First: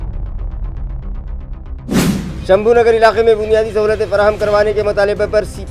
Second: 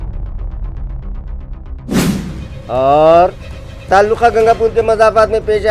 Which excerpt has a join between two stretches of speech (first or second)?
first